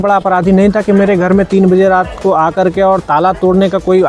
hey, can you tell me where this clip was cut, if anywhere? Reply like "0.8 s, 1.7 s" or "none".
none

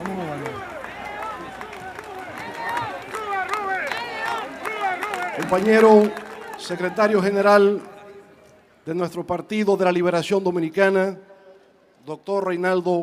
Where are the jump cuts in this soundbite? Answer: none

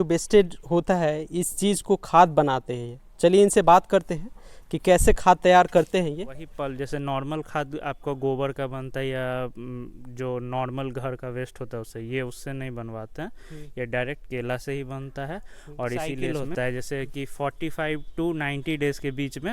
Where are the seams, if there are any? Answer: 6.5 s, 16.2 s

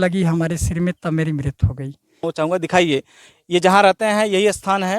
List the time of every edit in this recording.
2.3 s

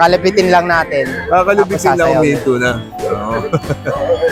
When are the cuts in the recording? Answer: none

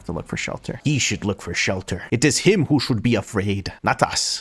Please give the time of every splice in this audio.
none

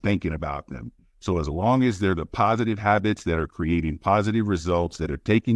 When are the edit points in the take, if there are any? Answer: 2.8 s

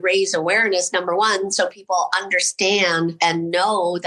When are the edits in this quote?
3.2 s

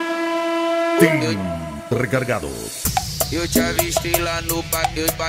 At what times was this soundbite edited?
0.9 s

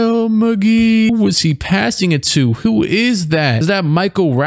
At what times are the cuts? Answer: 1.1 s

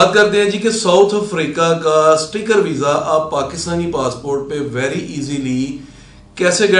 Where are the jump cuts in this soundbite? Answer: none

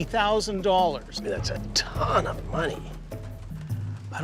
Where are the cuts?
none

